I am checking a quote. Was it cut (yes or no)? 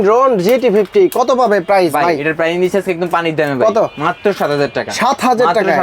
no